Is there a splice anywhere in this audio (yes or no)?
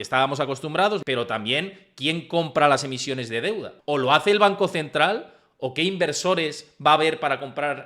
yes